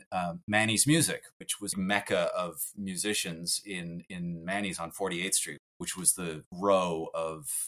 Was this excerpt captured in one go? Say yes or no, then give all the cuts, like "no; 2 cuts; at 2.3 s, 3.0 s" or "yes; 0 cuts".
no; 1 cut; at 1.7 s